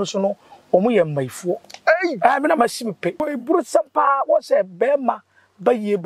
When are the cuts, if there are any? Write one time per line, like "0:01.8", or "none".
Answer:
0:03.3